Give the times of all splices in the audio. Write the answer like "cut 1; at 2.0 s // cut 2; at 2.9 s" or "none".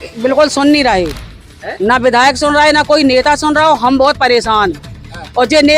none